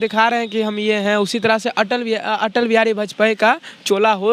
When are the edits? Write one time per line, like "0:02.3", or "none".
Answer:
none